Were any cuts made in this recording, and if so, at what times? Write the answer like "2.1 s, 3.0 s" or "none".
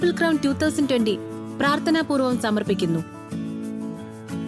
3.0 s

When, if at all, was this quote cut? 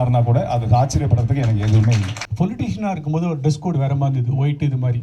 2.2 s

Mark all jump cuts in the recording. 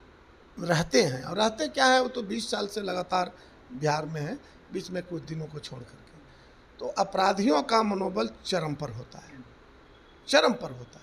none

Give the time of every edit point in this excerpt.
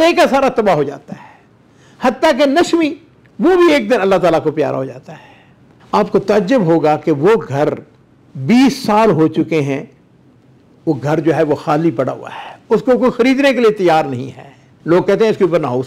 14.7 s

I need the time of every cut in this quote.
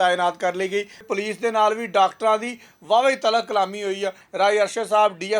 1.1 s, 4.2 s

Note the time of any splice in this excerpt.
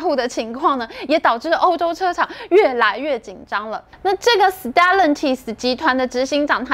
3.8 s

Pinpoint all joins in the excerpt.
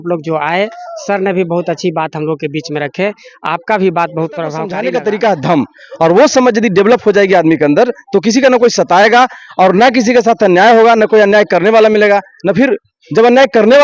4.7 s

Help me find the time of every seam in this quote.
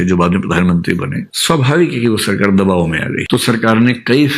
3.2 s

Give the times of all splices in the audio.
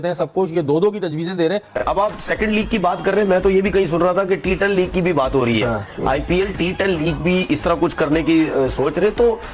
1.8 s

